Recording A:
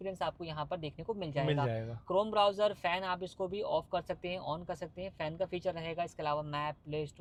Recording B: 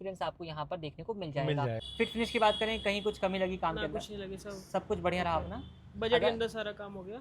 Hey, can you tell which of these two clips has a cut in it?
B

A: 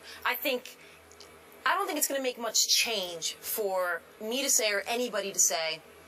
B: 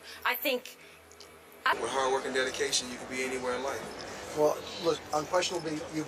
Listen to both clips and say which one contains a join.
A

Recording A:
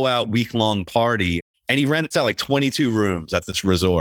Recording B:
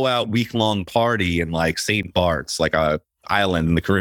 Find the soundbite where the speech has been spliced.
A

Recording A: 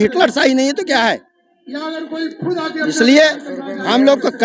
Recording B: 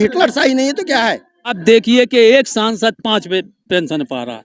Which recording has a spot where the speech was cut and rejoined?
B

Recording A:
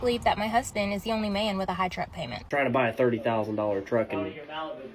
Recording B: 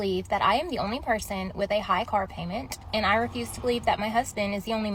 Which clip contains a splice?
A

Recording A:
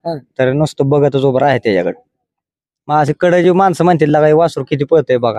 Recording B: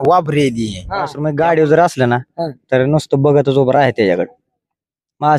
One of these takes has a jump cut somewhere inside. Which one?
B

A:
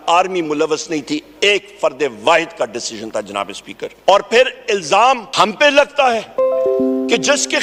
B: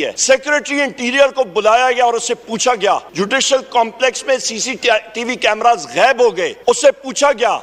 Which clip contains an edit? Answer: A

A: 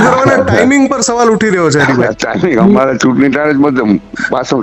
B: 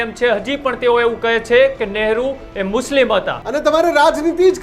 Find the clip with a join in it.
B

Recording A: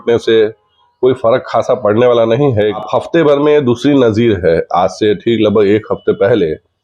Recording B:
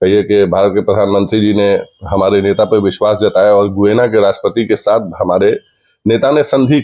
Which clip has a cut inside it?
A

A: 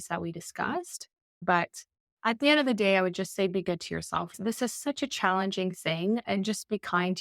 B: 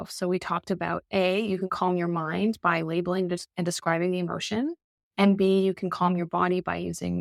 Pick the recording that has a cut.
A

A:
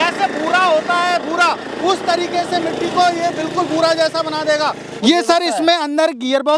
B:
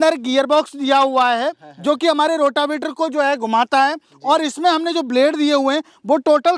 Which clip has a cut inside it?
A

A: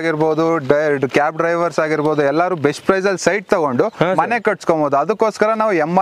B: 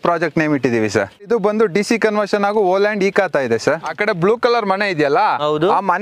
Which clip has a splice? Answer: B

